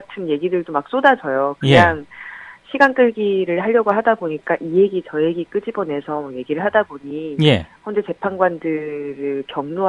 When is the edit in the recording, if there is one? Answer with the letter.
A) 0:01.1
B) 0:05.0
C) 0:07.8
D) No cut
D